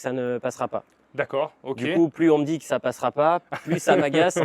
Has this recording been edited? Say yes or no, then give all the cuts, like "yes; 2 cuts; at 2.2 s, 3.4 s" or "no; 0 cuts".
no; 0 cuts